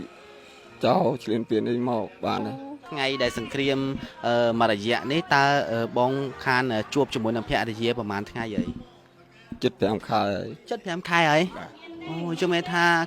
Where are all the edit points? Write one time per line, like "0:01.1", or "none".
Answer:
0:02.8